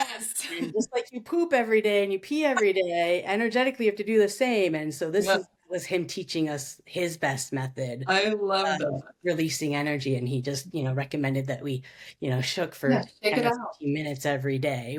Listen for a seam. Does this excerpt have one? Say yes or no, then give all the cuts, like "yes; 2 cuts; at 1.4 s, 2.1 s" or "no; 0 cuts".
no; 0 cuts